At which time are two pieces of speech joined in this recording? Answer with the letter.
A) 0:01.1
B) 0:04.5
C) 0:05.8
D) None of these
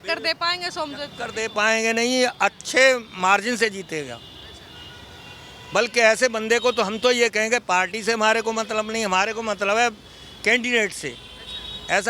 D